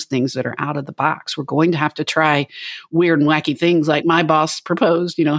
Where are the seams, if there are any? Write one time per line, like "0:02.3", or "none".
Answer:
none